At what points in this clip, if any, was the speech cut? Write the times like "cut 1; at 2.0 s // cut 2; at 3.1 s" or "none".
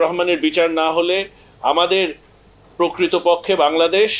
none